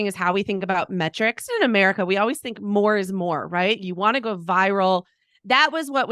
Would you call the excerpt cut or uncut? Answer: cut